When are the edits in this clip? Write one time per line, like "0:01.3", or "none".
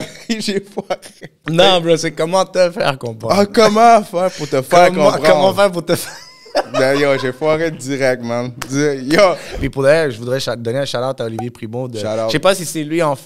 0:01.4
0:09.5

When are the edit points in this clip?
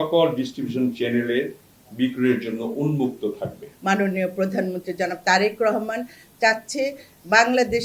0:03.7

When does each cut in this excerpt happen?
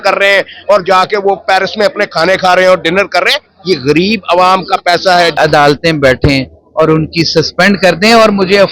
0:05.3

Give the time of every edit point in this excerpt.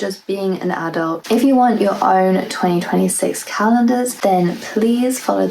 0:01.2
0:04.1

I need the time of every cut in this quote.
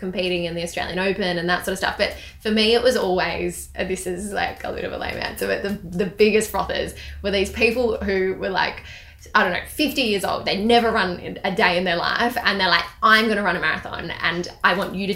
none

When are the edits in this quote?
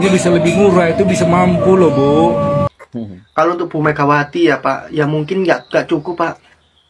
0:02.7

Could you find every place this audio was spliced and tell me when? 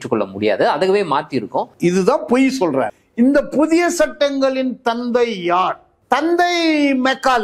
0:02.9

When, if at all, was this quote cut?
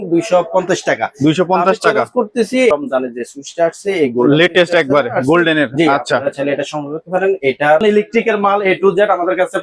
0:02.7
0:07.8

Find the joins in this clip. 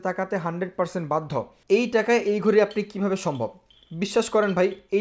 0:01.5

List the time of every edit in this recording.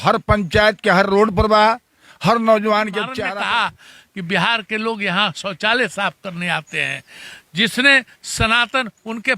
0:03.1

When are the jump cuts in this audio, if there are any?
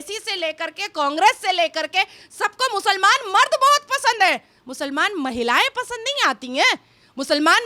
none

